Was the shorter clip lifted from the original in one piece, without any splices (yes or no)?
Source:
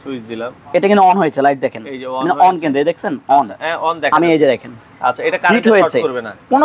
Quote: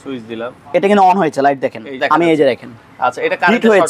no